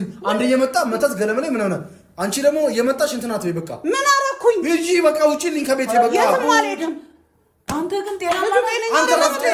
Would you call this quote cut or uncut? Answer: uncut